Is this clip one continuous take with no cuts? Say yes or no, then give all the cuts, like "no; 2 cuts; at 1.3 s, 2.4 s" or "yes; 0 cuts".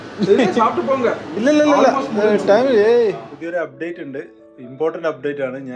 no; 1 cut; at 3.3 s